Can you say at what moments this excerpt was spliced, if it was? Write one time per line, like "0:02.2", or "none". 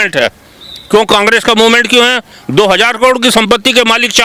none